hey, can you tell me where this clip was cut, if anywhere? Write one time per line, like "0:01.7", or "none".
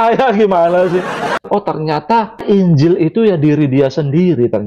0:01.4